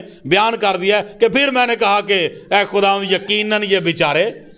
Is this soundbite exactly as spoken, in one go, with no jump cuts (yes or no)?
yes